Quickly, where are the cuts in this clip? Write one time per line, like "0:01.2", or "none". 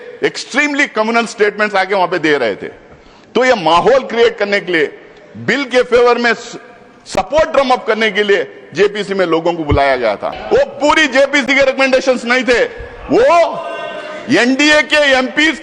0:10.3